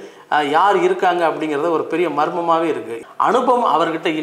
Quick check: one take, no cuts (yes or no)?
no